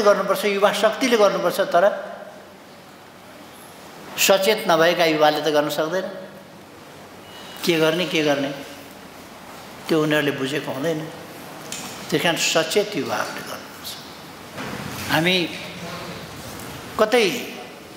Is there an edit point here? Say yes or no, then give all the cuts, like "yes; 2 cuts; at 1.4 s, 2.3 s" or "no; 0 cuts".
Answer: yes; 1 cut; at 14.6 s